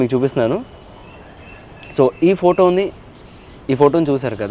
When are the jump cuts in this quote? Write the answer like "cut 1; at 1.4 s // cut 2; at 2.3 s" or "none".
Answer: none

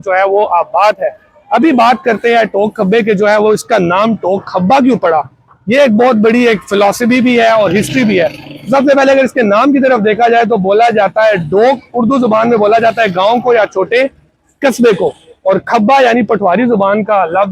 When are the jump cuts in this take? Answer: none

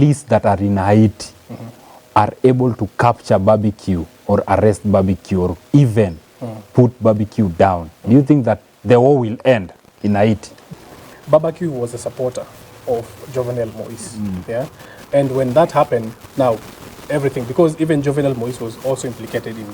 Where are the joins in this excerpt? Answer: cut 1; at 10.6 s

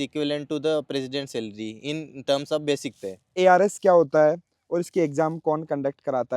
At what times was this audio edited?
cut 1; at 3.3 s

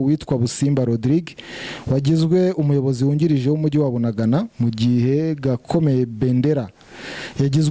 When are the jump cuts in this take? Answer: none

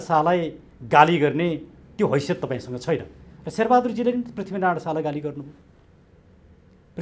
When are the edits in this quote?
none

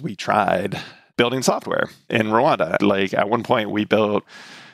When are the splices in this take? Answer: none

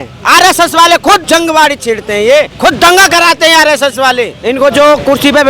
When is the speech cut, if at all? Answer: cut 1; at 1.2 s // cut 2; at 2.5 s // cut 3; at 4.4 s

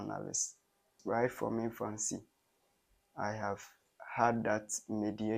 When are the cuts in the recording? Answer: cut 1; at 0.9 s

